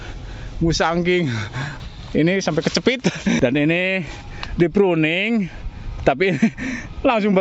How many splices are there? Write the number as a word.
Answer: two